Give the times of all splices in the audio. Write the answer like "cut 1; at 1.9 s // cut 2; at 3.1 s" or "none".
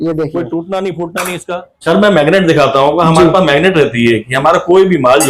cut 1; at 1.9 s